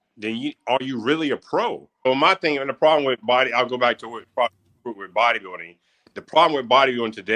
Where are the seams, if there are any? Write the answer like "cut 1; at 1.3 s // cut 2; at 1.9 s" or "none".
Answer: cut 1; at 1.9 s